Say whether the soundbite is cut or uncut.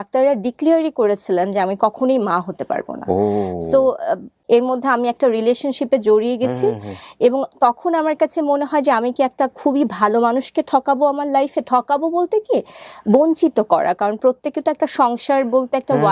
cut